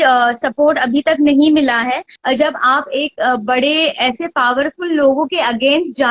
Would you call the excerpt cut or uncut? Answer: cut